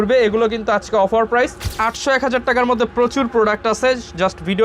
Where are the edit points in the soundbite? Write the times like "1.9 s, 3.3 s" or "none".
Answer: 1.8 s